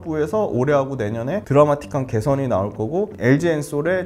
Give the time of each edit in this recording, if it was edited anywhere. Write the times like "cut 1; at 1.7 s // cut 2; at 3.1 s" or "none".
cut 1; at 1.4 s // cut 2; at 3.2 s